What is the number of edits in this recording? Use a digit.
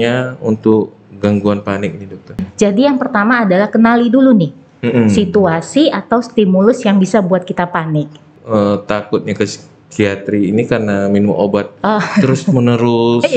2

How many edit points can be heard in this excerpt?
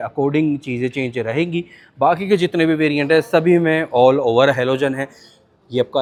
0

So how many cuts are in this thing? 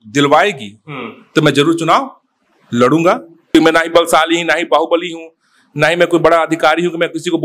1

